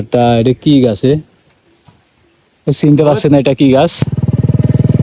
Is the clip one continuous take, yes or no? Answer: no